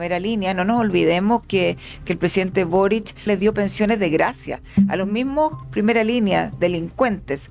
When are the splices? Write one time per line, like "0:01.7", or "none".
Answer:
none